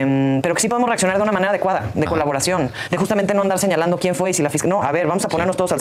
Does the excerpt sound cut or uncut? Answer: uncut